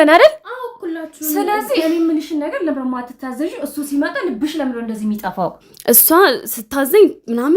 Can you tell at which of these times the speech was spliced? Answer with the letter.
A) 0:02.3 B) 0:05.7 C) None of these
B